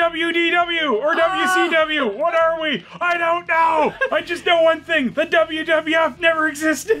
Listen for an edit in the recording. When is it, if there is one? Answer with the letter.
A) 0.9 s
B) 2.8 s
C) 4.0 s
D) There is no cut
C